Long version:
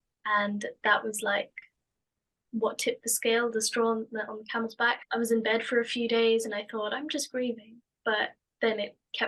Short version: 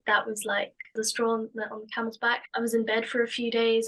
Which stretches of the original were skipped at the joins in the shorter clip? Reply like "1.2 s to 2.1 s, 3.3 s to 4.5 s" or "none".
1.7 s to 3.5 s